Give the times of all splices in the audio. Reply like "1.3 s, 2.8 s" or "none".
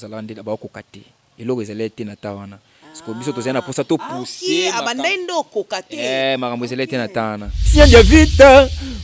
7.6 s